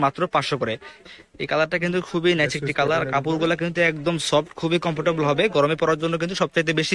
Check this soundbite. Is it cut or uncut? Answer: cut